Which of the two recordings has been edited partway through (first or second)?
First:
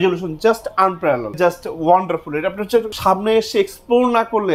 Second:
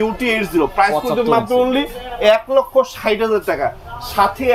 first